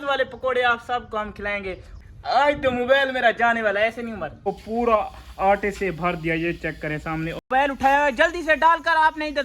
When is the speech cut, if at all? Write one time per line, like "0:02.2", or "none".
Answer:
0:01.9
0:04.5
0:07.8